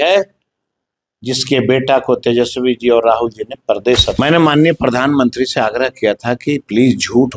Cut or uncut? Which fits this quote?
cut